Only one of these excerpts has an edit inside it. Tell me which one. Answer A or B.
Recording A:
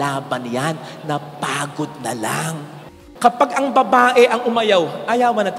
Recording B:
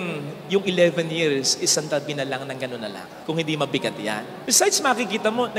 A